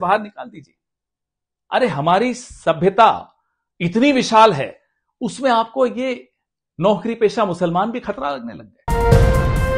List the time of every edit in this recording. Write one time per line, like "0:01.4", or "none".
0:08.9